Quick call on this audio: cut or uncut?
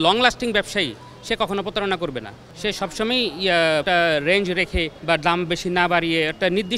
uncut